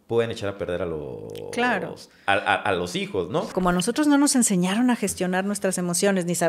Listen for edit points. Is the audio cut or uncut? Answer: cut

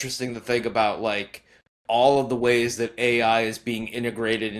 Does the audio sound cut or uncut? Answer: uncut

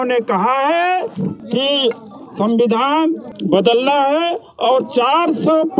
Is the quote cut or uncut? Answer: cut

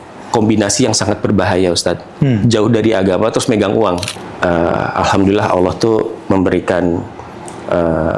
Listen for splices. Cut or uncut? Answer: cut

